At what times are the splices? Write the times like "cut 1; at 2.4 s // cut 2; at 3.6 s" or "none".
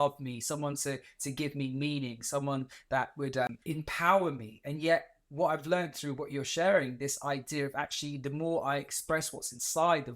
cut 1; at 3.5 s